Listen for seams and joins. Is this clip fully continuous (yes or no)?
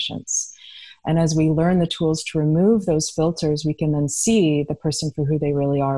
yes